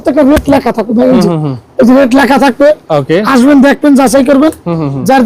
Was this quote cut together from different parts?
no; 0 cuts

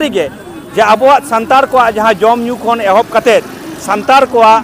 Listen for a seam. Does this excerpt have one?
no; 0 cuts

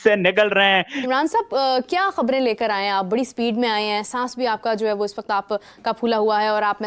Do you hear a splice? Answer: yes; 1 cut; at 1.0 s

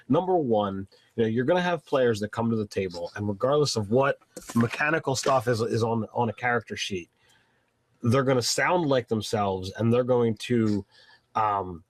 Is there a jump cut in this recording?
no; 0 cuts

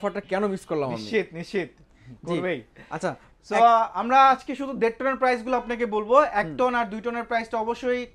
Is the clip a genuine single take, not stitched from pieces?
yes; 0 cuts

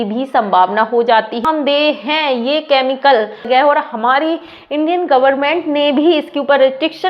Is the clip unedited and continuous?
no; 2 cuts; at 1.4 s, 3.5 s

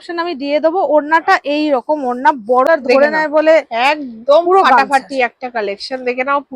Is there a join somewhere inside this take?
yes; 1 cut; at 2.7 s

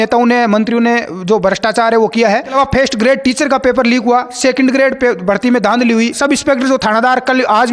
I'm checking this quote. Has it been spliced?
yes; 2 cuts; at 2.5 s, 6.2 s

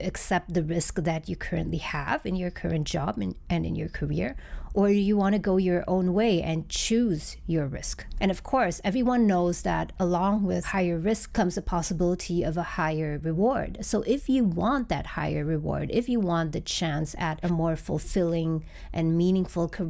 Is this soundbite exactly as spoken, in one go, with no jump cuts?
yes; 0 cuts

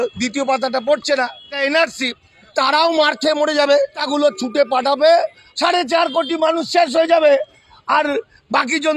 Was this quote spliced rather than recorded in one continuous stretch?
yes; 4 cuts; at 1.5 s, 2.5 s, 4.0 s, 5.4 s

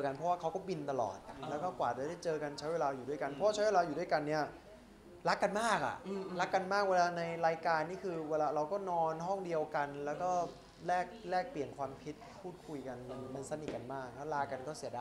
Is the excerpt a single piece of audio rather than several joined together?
yes; 0 cuts

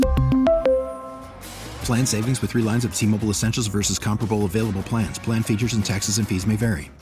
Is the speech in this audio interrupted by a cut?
no; 0 cuts

